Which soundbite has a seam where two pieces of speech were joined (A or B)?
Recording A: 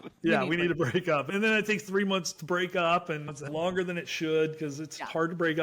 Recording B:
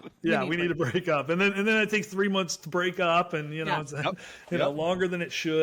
A